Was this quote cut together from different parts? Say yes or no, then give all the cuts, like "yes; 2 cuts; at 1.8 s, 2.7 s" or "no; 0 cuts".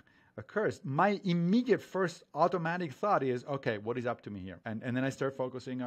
yes; 1 cut; at 4.5 s